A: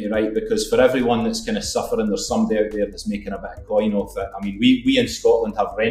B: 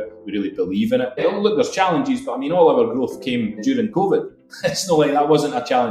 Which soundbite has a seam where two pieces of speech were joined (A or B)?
B